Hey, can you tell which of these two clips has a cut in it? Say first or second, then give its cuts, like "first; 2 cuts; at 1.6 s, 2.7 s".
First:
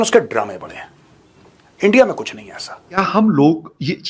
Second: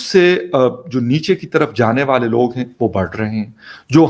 first; 1 cut; at 3.0 s